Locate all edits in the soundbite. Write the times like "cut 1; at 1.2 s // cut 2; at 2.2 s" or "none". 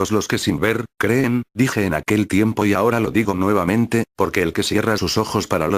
cut 1; at 1.7 s